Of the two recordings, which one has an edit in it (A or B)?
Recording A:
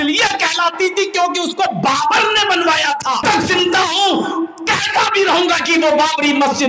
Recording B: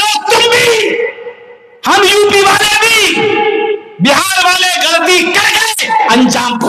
A